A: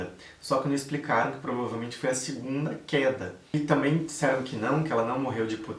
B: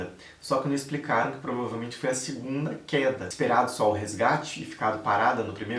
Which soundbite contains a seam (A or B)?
B